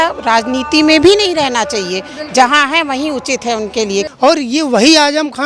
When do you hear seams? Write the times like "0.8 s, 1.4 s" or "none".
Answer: 4.0 s